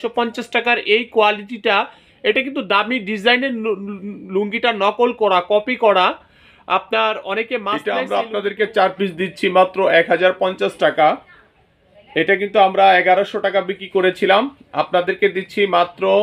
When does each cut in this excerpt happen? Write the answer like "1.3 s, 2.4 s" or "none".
7.7 s